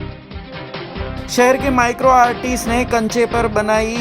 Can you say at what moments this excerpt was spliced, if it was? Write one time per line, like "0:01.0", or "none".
0:01.1